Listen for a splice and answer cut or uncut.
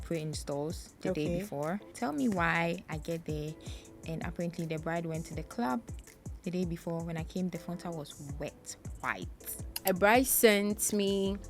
cut